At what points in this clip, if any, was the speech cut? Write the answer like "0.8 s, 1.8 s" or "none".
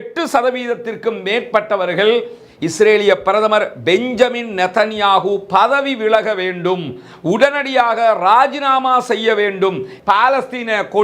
9.9 s